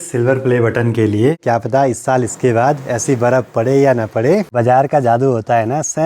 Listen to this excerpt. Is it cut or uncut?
cut